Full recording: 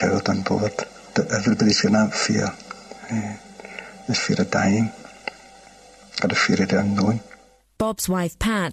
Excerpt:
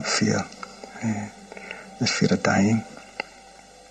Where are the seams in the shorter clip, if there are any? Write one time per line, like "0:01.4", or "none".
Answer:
none

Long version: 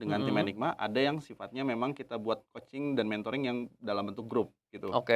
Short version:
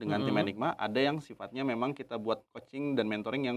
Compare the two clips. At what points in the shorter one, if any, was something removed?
none

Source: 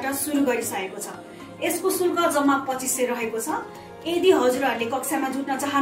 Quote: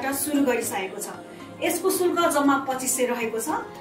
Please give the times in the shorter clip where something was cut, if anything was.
none

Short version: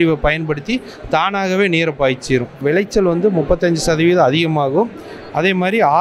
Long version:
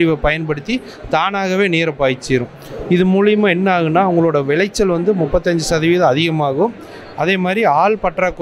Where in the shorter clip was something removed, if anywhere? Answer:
0:02.6

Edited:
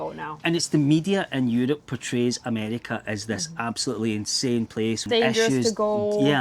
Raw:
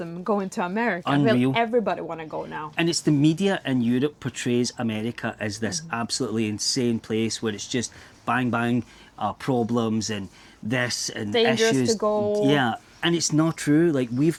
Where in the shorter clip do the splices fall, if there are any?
0:05.0

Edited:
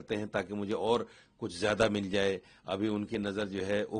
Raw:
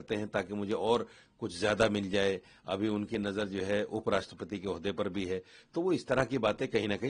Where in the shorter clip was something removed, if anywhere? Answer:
none

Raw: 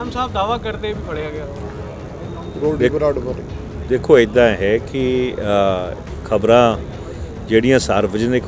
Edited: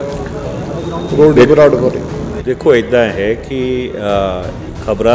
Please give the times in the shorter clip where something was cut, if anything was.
none

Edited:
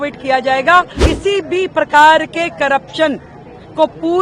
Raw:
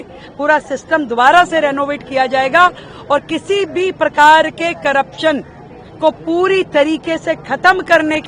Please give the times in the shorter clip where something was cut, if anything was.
0:01.1

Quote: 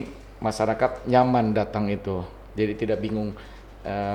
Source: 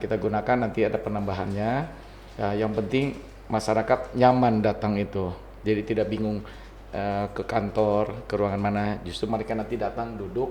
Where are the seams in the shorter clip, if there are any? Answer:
none

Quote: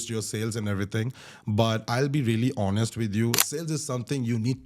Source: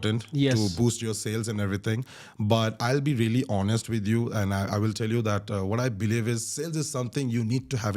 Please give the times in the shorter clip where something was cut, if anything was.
0:03.4

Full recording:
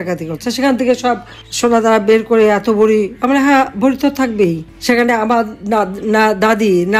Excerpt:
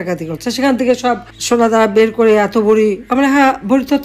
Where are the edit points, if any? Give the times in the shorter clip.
0:01.3

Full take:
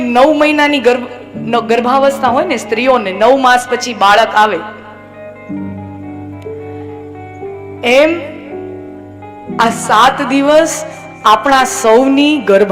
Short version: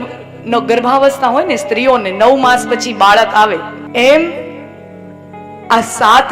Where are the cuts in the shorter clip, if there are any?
0:03.8

